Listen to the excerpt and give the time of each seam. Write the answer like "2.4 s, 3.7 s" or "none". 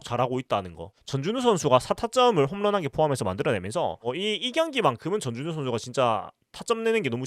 1.0 s